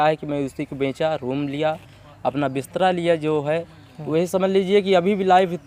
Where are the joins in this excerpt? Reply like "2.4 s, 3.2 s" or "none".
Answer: none